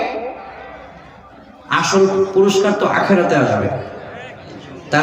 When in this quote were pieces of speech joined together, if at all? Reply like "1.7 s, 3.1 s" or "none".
none

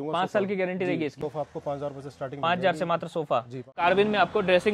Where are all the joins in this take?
1.2 s, 3.8 s

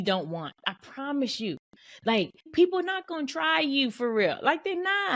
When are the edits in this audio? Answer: 2.5 s

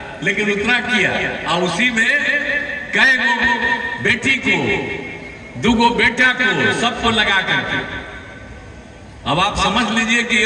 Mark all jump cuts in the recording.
none

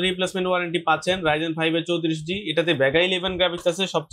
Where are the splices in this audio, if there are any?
none

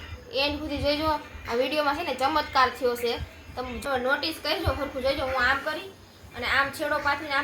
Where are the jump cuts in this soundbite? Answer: 3.8 s

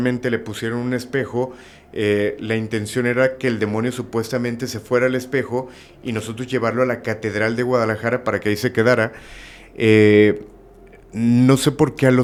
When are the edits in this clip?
none

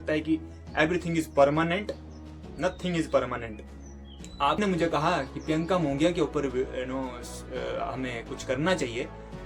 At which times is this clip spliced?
4.6 s

